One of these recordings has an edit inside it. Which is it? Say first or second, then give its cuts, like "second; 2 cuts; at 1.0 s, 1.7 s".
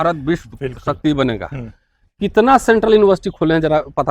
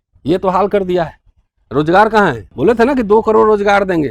second; 1 cut; at 2.5 s